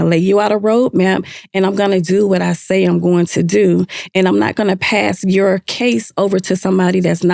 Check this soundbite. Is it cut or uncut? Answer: uncut